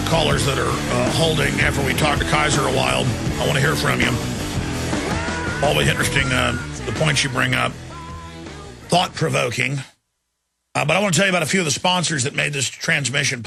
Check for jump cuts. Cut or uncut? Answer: uncut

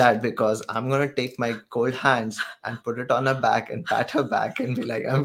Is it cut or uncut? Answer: uncut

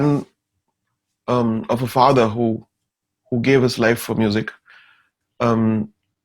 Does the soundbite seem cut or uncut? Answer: uncut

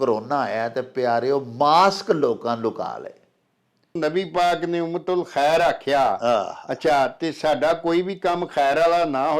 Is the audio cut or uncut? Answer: cut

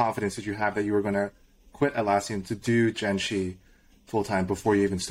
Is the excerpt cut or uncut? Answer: uncut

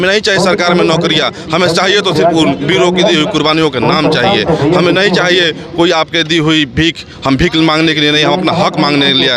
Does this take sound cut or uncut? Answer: uncut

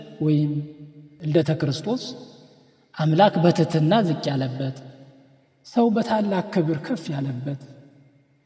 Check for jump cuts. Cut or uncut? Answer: cut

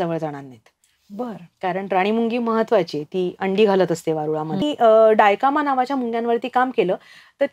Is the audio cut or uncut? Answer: cut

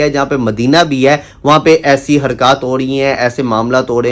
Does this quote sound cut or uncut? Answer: uncut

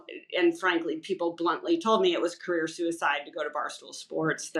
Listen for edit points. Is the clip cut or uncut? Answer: uncut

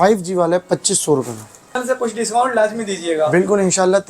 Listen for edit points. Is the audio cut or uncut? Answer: cut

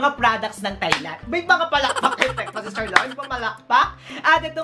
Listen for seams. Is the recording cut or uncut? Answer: uncut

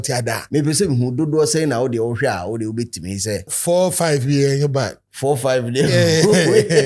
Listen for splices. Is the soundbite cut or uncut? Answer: cut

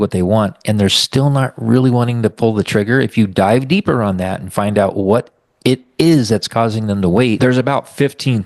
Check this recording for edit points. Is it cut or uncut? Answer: cut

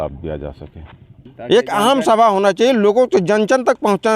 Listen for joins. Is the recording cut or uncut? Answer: cut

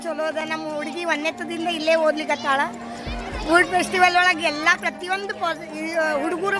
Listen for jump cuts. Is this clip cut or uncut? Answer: uncut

